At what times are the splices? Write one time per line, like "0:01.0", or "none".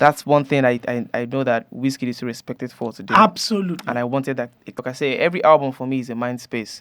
0:04.8